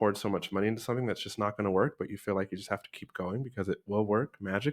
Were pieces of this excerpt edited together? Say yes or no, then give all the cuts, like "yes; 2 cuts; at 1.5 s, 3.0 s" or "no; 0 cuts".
no; 0 cuts